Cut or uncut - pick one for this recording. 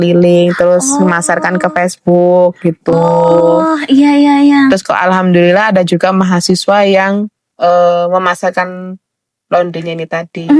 uncut